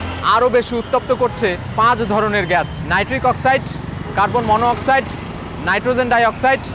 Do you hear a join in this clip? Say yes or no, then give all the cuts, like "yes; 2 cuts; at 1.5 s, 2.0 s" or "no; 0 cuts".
yes; 2 cuts; at 1.6 s, 2.8 s